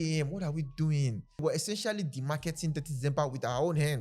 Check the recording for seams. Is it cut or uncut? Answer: cut